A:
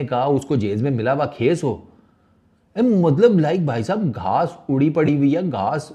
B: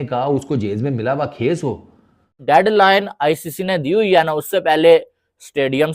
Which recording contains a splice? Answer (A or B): B